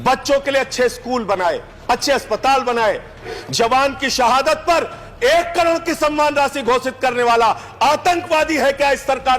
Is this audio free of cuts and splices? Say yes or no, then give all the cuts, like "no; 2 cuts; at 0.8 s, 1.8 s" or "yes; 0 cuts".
no; 2 cuts; at 1.7 s, 3.3 s